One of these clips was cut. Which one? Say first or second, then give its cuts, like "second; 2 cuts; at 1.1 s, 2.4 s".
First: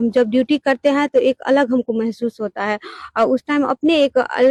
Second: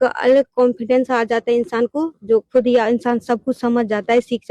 second; 1 cut; at 1.7 s